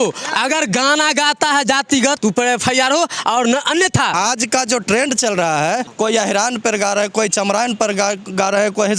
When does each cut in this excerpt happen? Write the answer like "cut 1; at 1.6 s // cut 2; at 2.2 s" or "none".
cut 1; at 2.2 s // cut 2; at 4.1 s // cut 3; at 5.9 s